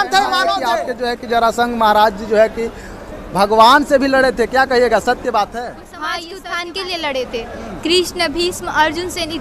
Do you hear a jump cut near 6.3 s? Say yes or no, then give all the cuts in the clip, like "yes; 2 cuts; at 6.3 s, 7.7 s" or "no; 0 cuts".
yes; 2 cuts; at 0.8 s, 6.3 s